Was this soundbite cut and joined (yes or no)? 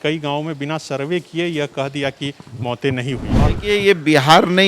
yes